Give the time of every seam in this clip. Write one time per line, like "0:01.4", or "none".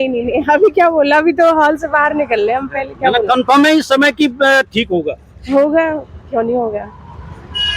none